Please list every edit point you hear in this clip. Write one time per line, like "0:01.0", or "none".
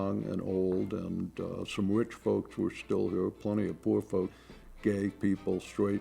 0:04.3